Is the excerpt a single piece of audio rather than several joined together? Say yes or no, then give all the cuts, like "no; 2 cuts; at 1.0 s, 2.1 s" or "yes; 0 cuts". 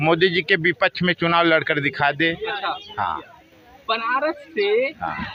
yes; 0 cuts